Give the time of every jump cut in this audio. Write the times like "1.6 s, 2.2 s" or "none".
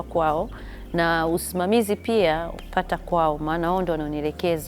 2.6 s